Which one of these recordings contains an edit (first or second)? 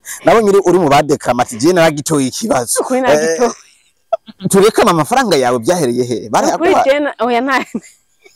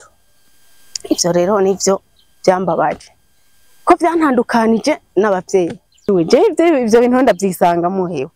second